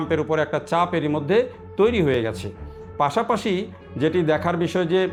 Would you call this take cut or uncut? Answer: uncut